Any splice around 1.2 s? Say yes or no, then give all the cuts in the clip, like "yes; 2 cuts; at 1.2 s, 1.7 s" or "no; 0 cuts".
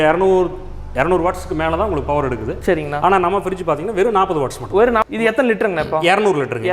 no; 1 cut; at 5.1 s